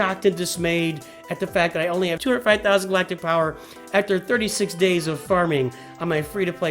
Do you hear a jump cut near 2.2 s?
yes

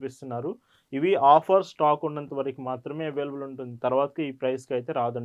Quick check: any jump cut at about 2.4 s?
no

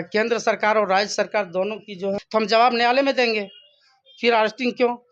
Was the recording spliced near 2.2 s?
yes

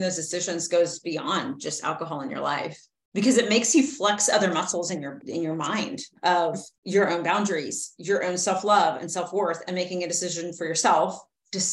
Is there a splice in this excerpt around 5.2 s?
yes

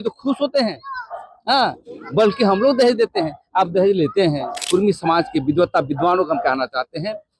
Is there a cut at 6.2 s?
no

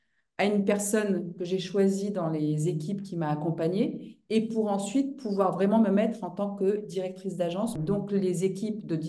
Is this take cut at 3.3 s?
no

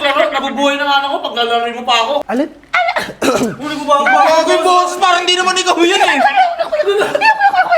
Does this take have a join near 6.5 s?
no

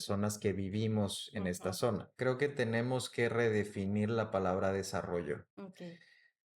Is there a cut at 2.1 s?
yes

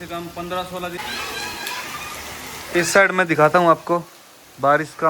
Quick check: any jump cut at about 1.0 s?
yes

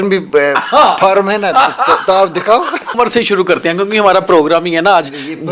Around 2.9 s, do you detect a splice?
yes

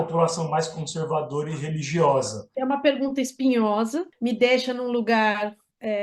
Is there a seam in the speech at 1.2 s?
no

